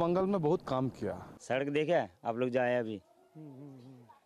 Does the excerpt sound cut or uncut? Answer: cut